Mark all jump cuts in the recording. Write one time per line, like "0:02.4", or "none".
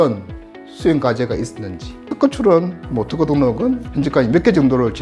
0:02.1
0:03.9